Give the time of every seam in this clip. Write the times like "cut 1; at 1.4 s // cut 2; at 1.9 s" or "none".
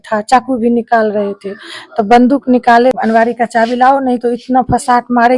cut 1; at 3.0 s